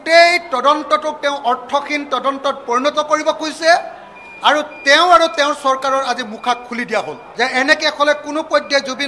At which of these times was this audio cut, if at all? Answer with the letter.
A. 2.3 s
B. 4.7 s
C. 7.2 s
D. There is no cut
C